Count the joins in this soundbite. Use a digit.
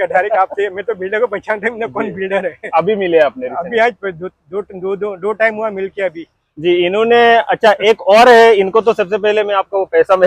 0